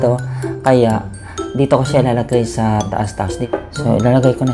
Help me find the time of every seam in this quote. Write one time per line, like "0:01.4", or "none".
0:03.4